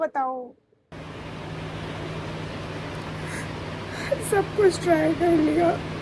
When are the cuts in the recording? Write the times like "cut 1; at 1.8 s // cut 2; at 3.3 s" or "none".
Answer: cut 1; at 1.0 s